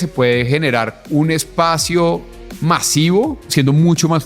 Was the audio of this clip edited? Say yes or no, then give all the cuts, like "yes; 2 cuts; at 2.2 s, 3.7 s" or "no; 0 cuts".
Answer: yes; 2 cuts; at 1.0 s, 3.4 s